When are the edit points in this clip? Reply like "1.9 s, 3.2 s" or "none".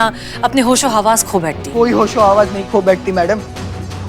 1.6 s